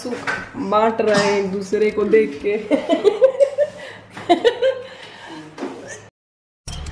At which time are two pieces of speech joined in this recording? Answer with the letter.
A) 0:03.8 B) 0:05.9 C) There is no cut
B